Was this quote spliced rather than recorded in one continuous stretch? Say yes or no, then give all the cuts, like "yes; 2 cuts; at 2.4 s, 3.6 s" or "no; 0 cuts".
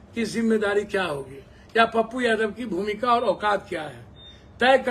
no; 0 cuts